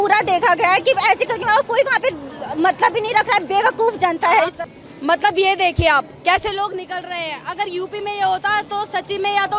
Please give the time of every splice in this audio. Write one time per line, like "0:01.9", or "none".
none

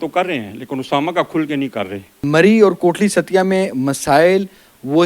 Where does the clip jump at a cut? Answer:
none

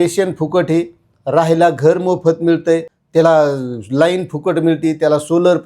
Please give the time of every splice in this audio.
0:02.9

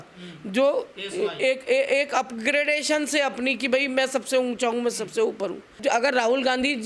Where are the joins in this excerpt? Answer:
0:05.8

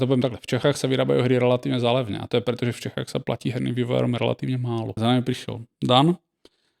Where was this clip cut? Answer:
0:04.9

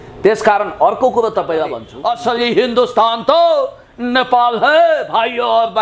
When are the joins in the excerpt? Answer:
0:01.9

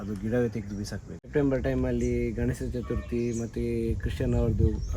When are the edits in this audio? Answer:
0:01.2

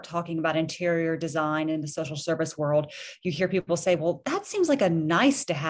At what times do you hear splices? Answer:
0:04.2

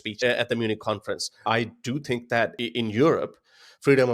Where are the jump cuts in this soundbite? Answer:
0:01.3
0:02.6

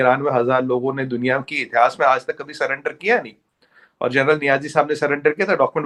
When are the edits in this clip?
none

